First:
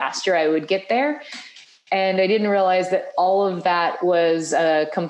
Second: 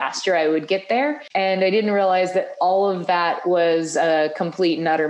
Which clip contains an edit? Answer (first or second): second